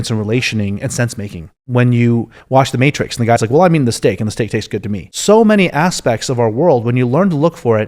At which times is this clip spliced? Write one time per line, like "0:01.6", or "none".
0:01.6
0:05.1